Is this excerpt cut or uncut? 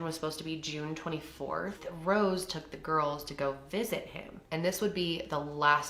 cut